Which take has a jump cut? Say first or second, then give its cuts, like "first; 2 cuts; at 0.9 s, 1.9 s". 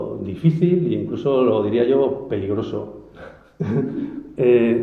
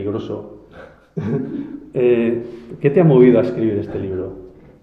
first; 1 cut; at 1.3 s